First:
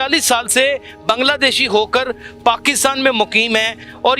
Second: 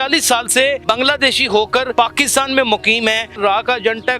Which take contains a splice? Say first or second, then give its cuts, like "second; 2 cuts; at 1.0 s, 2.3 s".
second; 3 cuts; at 0.8 s, 1.9 s, 3.3 s